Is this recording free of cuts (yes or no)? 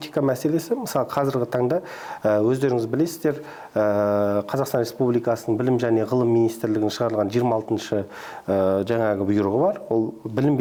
yes